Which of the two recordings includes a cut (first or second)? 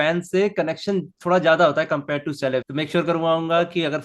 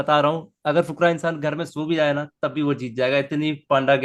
first